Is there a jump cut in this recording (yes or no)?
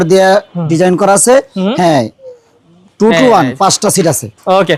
no